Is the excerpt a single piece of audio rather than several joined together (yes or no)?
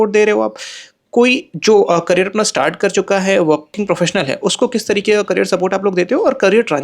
no